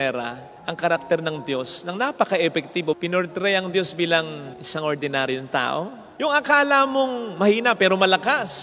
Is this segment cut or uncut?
cut